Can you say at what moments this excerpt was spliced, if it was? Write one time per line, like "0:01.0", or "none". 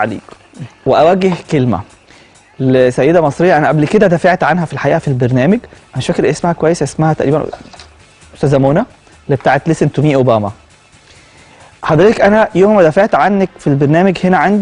0:12.8